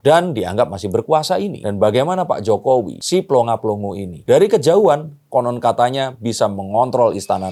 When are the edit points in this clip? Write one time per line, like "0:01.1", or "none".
none